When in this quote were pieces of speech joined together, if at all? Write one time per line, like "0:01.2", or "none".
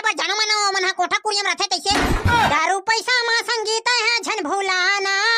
0:02.5